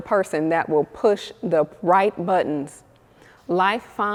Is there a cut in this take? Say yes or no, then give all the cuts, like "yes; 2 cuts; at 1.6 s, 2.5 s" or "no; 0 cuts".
no; 0 cuts